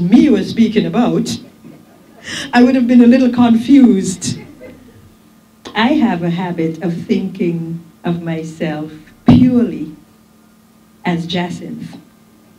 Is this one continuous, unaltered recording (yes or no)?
yes